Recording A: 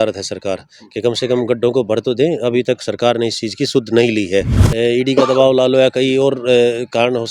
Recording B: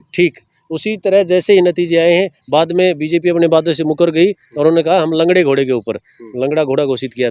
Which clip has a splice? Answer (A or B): A